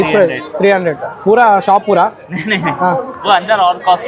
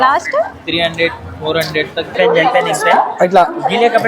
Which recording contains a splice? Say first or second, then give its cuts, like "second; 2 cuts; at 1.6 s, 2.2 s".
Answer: second; 1 cut; at 2.1 s